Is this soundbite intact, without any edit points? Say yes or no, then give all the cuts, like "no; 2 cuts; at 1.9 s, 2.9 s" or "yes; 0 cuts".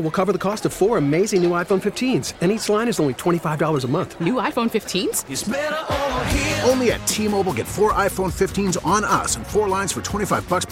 yes; 0 cuts